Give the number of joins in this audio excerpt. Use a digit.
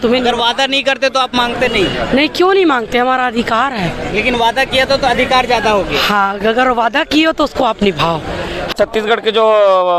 1